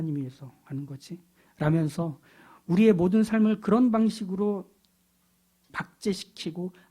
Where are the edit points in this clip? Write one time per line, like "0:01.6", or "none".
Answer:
0:05.7